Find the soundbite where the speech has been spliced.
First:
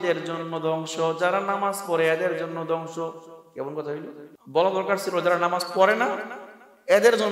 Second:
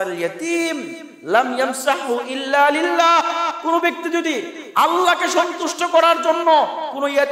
first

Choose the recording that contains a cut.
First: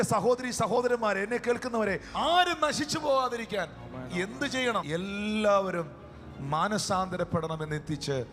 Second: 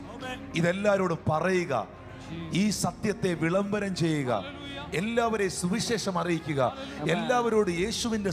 first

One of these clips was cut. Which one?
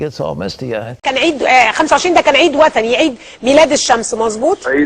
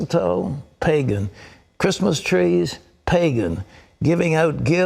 first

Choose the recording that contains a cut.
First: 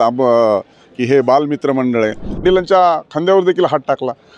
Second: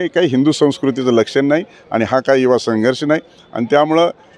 first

